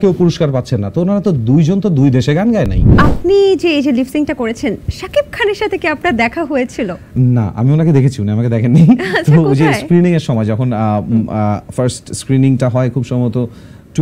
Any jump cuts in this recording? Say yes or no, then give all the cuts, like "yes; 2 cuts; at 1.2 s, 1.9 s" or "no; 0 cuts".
yes; 1 cut; at 2.9 s